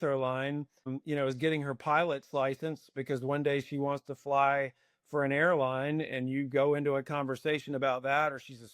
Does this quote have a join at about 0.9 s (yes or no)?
yes